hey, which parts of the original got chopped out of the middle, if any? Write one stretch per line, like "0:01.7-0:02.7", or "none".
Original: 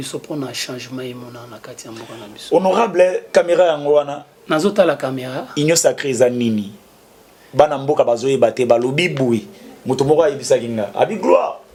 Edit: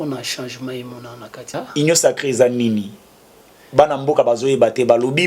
0:01.8-0:05.3